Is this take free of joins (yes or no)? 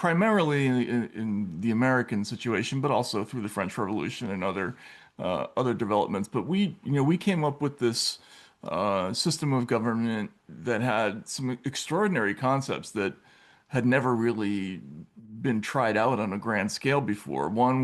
yes